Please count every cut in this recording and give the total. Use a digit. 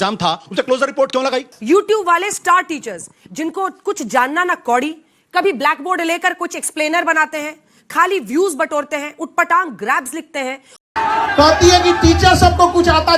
2